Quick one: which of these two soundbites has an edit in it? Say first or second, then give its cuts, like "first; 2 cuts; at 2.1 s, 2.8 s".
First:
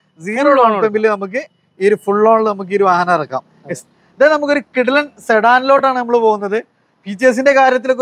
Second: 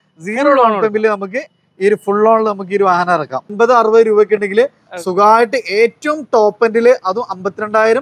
second; 1 cut; at 3.5 s